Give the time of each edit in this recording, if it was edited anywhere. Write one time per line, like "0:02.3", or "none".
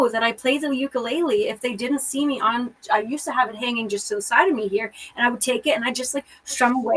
none